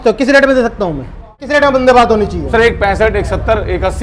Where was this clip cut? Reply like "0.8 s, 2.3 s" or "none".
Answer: 1.4 s